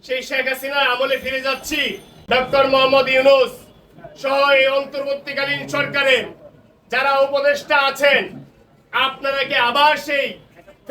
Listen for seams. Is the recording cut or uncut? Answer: cut